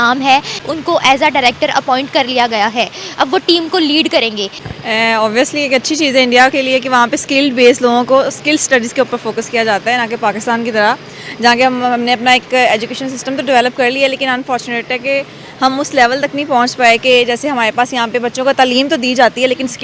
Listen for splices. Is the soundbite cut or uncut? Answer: uncut